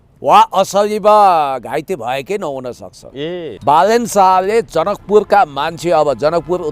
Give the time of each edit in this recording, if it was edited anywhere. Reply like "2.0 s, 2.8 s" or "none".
3.5 s